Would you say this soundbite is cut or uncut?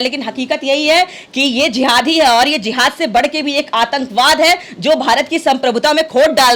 uncut